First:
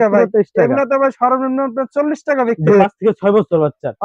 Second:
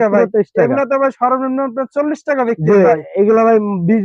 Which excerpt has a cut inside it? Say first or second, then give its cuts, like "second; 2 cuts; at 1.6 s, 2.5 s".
first; 1 cut; at 2.8 s